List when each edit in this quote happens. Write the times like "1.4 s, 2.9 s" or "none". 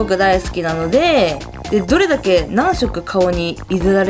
none